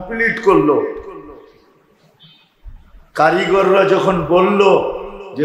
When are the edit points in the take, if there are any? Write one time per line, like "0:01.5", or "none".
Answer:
none